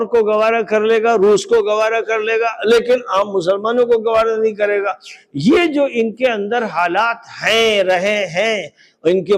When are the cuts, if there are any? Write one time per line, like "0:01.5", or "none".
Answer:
none